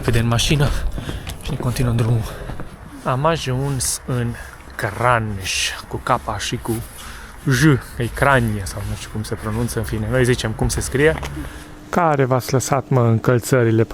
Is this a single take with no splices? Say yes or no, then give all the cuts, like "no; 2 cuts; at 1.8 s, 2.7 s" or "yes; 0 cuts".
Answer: no; 2 cuts; at 2.6 s, 11.8 s